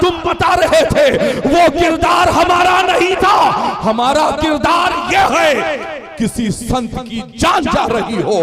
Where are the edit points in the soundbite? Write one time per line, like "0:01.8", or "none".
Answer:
none